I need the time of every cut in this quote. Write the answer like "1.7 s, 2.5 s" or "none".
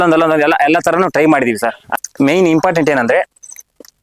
1.8 s

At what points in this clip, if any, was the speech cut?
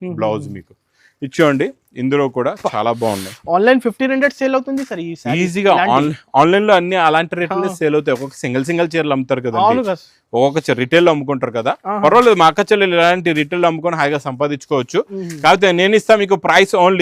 none

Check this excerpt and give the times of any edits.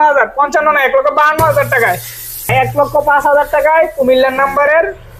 2.5 s

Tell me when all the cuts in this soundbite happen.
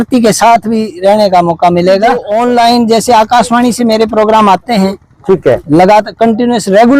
2.3 s

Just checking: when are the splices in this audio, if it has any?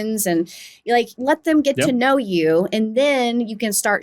1.1 s

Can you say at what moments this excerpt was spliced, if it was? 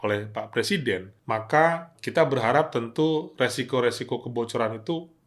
1.1 s, 1.9 s

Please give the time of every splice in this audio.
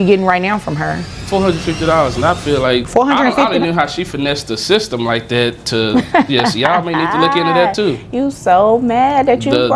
1.1 s, 2.9 s

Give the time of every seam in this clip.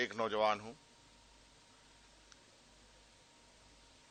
none

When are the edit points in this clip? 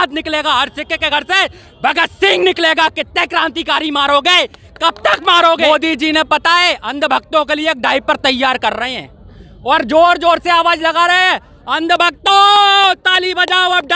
5.7 s

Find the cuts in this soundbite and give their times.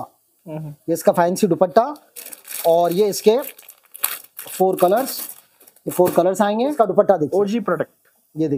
6.7 s

